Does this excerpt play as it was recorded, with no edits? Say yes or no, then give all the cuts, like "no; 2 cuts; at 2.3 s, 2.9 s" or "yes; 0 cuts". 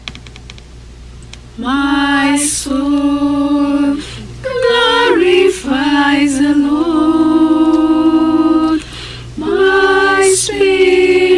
yes; 0 cuts